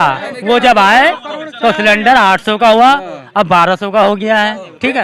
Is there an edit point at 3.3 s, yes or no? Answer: no